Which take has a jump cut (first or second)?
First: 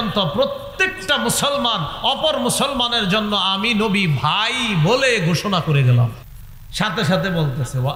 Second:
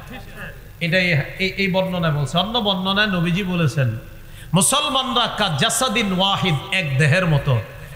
first